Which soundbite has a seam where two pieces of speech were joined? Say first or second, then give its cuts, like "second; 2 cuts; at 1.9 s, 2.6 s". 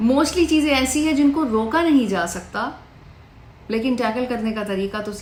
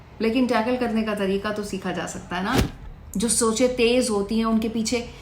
second; 1 cut; at 2.6 s